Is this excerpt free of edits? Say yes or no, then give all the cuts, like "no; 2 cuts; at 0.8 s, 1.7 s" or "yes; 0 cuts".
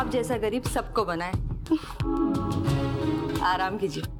yes; 0 cuts